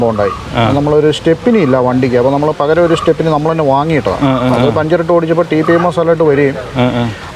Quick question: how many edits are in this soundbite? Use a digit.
0